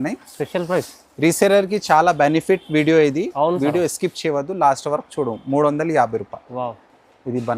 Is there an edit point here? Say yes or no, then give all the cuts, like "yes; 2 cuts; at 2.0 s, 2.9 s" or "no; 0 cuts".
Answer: no; 0 cuts